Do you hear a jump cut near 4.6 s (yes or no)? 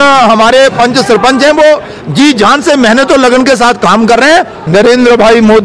yes